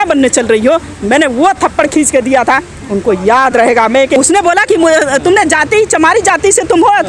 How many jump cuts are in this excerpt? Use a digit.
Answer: 1